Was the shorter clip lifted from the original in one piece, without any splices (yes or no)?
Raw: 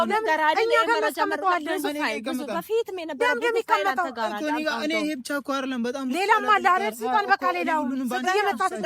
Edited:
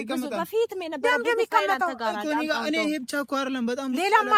yes